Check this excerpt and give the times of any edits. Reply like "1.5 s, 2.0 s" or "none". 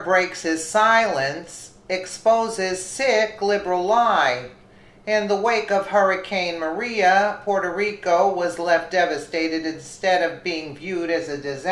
none